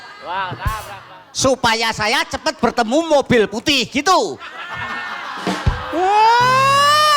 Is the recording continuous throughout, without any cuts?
no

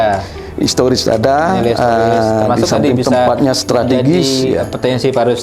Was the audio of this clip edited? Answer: no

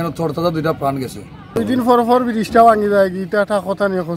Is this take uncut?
no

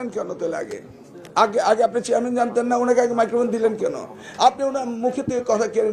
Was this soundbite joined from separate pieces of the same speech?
no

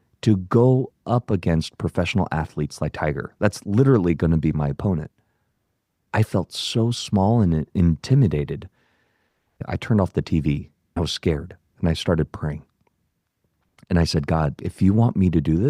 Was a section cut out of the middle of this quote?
yes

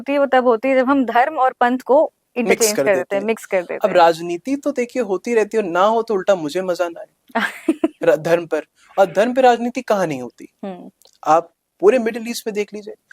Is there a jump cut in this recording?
no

